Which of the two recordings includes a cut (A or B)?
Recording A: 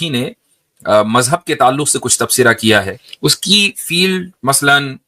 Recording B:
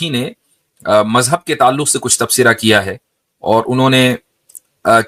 A